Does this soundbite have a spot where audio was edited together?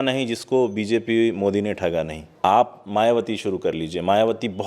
yes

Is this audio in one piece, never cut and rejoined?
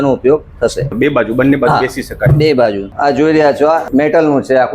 no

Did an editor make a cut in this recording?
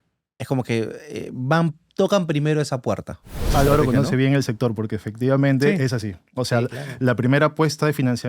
yes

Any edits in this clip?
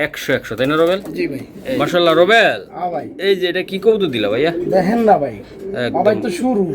yes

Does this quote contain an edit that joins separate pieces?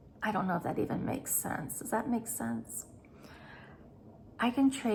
no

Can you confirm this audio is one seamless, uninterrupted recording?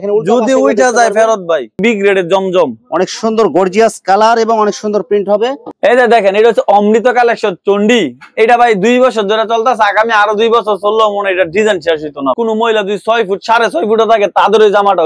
no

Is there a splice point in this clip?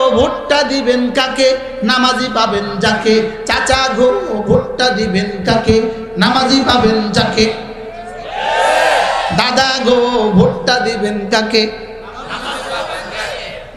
no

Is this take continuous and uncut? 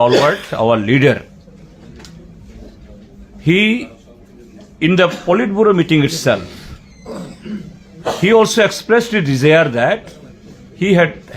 no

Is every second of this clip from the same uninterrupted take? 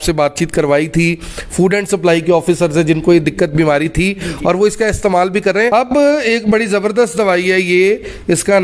no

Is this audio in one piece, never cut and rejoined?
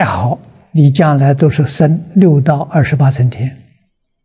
yes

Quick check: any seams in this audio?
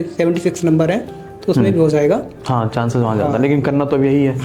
no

